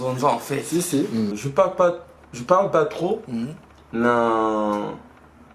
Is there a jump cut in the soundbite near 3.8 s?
no; 1 cut; at 1.4 s

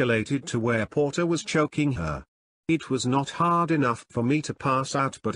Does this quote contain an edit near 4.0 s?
no; 1 cut; at 2.0 s

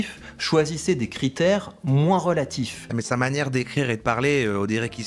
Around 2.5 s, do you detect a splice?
no; 0 cuts

